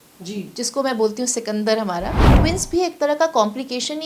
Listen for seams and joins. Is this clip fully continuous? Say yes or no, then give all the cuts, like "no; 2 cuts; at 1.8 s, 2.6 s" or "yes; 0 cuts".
no; 1 cut; at 2.3 s